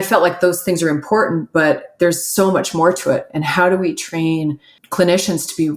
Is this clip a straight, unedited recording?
no; 1 cut; at 4.8 s

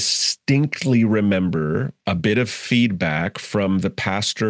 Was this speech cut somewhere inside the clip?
yes; 1 cut; at 1.9 s

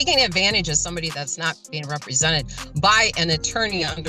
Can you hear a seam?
no; 0 cuts

